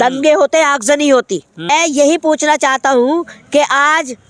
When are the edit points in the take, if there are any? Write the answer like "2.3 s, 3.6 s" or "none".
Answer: 1.5 s